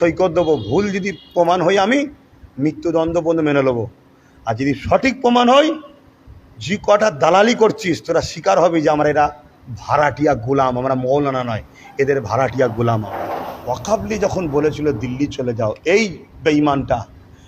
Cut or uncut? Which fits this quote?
cut